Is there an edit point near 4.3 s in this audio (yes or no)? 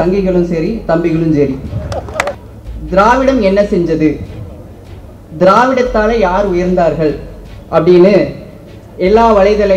no